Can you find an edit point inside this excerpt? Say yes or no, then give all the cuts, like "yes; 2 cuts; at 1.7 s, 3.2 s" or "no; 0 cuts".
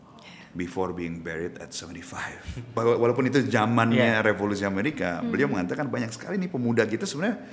yes; 1 cut; at 2.8 s